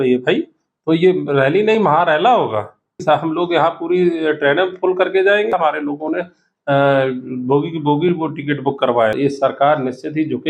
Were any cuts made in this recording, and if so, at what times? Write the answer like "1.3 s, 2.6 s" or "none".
3.0 s, 5.5 s, 9.2 s